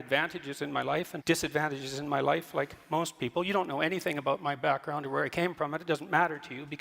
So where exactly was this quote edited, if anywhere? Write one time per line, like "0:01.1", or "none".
0:01.1